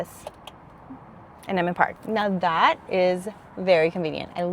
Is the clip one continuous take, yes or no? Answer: no